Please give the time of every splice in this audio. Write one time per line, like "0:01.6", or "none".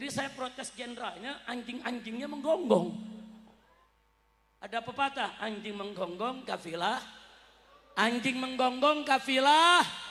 none